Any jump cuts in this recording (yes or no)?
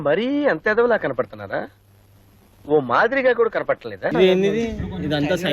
yes